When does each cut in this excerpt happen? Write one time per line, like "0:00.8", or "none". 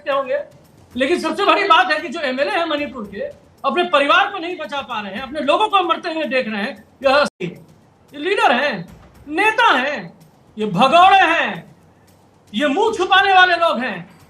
0:07.3